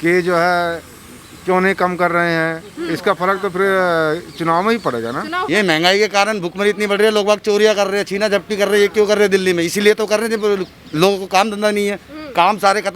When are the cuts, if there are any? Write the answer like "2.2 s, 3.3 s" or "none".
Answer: 5.5 s